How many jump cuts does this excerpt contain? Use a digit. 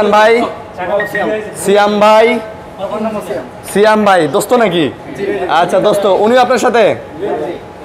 0